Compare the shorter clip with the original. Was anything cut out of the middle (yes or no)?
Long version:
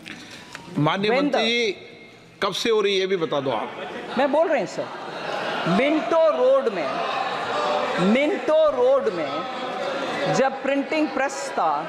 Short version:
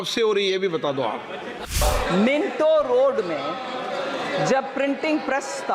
yes